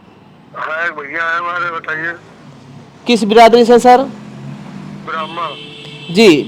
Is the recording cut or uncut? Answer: uncut